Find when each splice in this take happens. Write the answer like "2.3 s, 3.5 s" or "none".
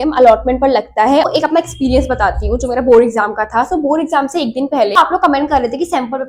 1.3 s, 5.0 s